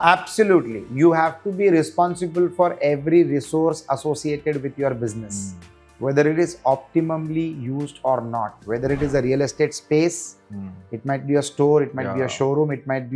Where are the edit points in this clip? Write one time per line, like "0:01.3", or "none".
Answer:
none

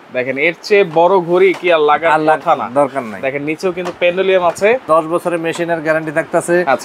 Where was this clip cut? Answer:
0:04.8

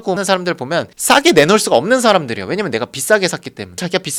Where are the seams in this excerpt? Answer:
none

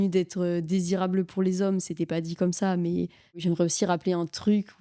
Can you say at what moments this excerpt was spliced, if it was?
0:03.4

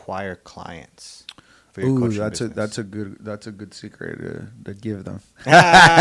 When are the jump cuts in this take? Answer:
none

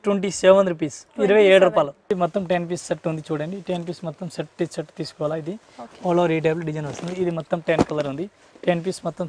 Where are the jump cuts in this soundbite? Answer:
0:02.0

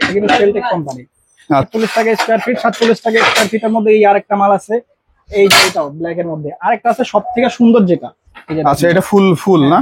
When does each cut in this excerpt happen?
0:01.7

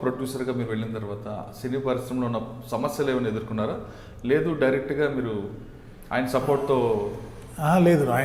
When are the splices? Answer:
none

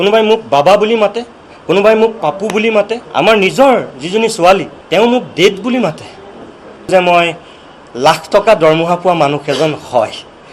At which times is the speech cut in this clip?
0:03.0
0:04.8
0:06.9

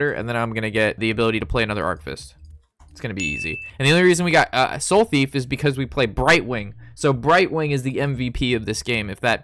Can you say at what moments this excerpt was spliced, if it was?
0:01.0

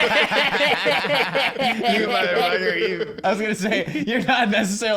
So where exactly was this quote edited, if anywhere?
0:03.2

